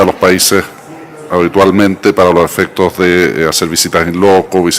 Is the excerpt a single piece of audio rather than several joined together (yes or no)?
yes